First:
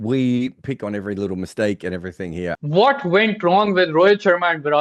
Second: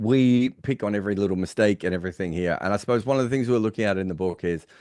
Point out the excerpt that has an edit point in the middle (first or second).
first